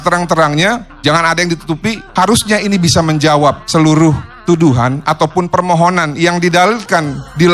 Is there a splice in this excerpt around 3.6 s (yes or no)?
yes